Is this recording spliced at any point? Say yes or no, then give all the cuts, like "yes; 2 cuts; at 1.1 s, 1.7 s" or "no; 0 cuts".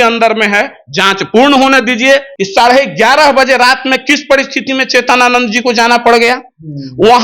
yes; 1 cut; at 2.3 s